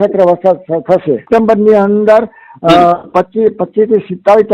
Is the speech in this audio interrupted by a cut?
yes; 1 cut; at 1.2 s

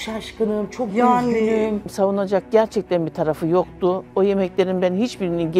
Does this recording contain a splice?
yes; 1 cut; at 1.9 s

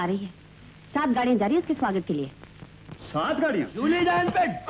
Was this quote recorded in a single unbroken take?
no; 1 cut; at 3.7 s

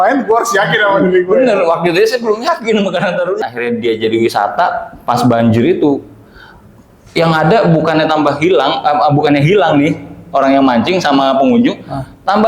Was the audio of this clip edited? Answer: yes; 1 cut; at 3.4 s

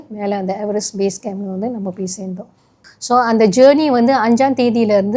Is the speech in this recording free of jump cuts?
no; 1 cut; at 2.8 s

